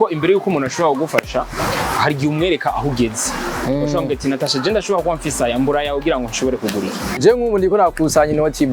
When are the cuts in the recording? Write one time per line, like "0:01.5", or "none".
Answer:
0:07.2